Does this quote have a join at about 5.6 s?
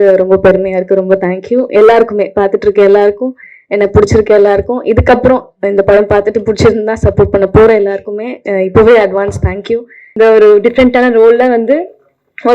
no; 1 cut; at 10.1 s

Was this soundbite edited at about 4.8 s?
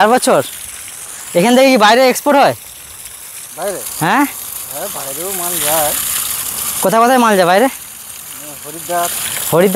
no; 0 cuts

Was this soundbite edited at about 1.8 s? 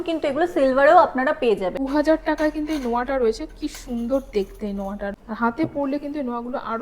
yes; 2 cuts; at 1.8 s, 5.2 s

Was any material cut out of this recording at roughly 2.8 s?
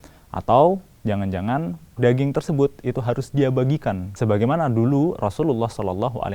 no; 1 cut; at 4.1 s

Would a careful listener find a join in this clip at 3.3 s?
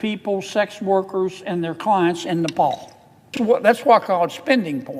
yes; 1 cut; at 3.3 s

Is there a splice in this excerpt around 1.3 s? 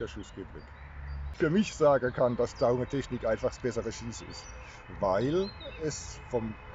yes; 1 cut; at 1.3 s

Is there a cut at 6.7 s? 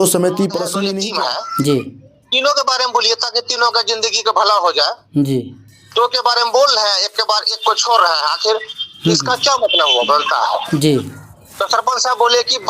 no; 1 cut; at 1.0 s

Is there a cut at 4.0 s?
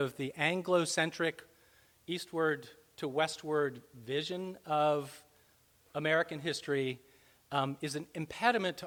no; 0 cuts

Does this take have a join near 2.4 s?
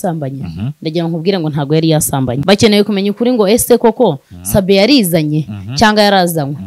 yes; 1 cut; at 2.4 s

